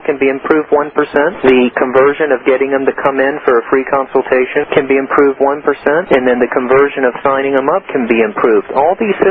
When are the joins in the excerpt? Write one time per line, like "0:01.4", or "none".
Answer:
0:01.3
0:04.6
0:06.0